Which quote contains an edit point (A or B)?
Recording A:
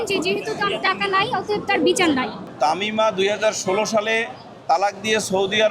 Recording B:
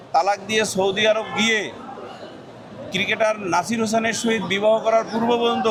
A